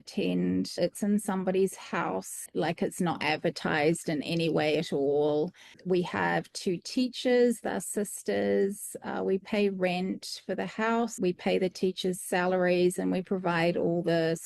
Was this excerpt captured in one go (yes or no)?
no